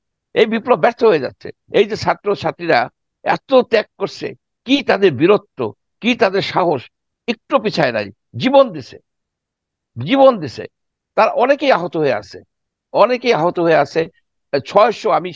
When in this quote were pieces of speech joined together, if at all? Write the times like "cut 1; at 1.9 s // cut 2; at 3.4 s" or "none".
cut 1; at 1.6 s